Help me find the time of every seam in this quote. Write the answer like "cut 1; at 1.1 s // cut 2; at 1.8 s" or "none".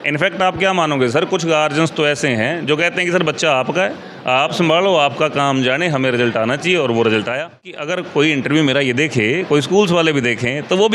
cut 1; at 7.9 s